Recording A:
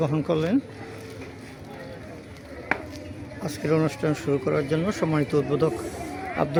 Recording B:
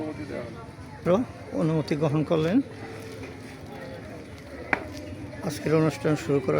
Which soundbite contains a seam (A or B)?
B